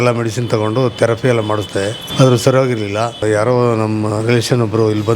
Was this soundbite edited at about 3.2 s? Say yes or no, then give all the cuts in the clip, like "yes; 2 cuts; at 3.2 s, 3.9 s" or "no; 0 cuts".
yes; 2 cuts; at 2.0 s, 3.2 s